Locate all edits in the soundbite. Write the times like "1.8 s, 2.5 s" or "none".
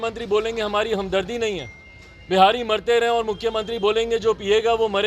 none

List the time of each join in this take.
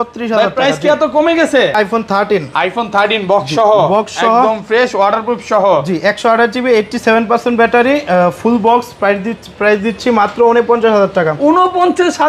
1.8 s

